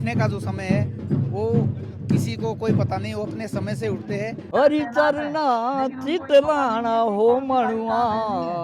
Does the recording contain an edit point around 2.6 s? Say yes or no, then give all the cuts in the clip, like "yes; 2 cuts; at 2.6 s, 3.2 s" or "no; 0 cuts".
no; 1 cut; at 4.4 s